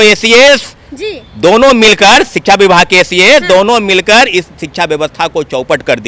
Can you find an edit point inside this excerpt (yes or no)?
no